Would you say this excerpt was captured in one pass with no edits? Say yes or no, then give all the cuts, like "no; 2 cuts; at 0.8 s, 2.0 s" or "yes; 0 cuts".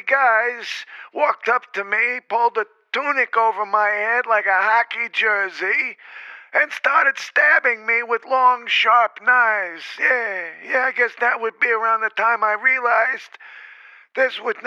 yes; 0 cuts